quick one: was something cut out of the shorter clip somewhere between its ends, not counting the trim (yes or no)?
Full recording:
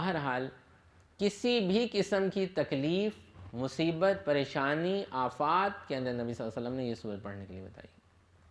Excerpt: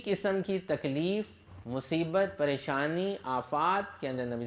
no